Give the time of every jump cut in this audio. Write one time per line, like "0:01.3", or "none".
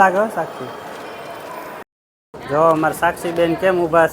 0:01.8